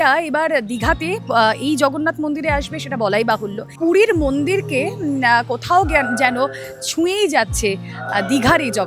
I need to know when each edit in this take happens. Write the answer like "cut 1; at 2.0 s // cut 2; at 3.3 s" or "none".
cut 1; at 3.7 s